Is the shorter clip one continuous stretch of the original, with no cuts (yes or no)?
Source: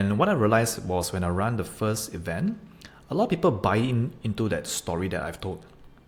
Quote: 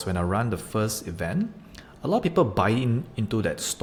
yes